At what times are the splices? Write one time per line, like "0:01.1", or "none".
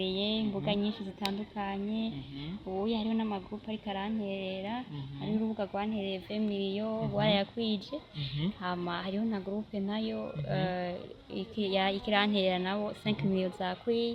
none